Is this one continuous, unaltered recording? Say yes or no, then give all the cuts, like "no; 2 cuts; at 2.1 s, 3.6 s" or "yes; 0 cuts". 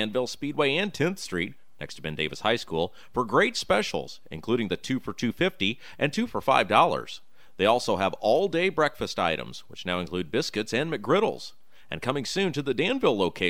yes; 0 cuts